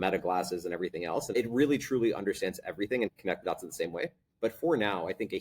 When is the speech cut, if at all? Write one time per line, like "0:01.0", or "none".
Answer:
0:01.3
0:03.1